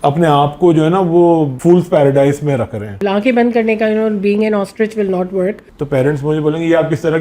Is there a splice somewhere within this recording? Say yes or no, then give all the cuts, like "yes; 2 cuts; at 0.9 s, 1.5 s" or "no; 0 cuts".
yes; 3 cuts; at 1.5 s, 3.0 s, 5.6 s